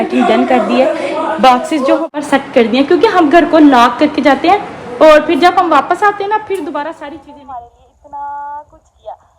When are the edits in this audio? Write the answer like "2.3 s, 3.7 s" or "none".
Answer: 2.1 s, 7.0 s

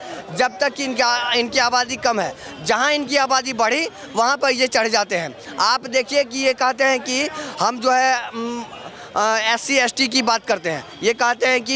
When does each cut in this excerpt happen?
none

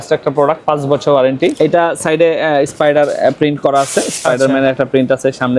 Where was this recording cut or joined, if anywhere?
1.5 s

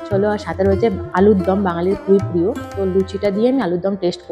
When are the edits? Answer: none

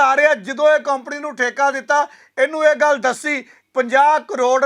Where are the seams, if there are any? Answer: 3.5 s

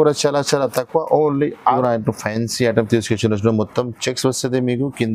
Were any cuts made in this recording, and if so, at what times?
1.8 s

